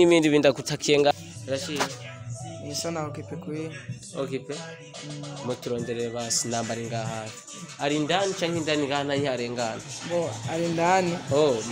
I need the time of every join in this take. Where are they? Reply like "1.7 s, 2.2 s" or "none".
1.1 s